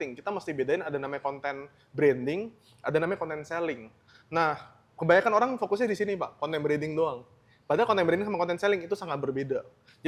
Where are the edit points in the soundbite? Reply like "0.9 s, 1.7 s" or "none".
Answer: none